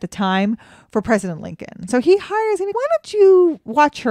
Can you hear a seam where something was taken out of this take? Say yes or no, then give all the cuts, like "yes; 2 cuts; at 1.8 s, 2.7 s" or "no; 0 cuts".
yes; 2 cuts; at 1.8 s, 2.7 s